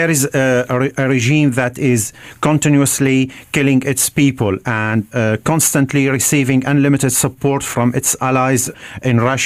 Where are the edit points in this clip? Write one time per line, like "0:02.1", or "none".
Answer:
0:07.6